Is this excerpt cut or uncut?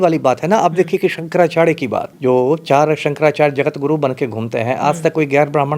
cut